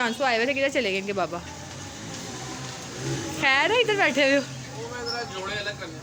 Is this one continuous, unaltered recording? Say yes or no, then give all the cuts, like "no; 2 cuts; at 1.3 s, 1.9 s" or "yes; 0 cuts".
yes; 0 cuts